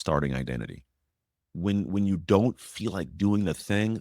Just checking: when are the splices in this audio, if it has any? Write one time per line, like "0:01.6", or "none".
0:01.5